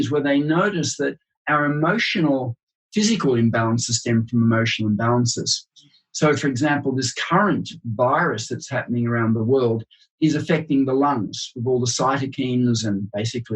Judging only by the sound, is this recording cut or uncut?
cut